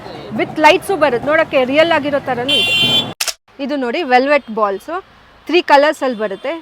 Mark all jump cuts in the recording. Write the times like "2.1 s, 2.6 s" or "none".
1.2 s, 3.2 s